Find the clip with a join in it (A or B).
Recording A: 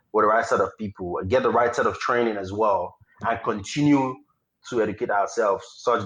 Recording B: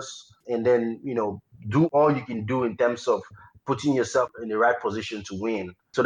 B